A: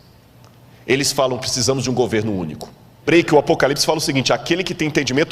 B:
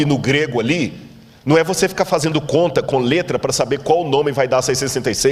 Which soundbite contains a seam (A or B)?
A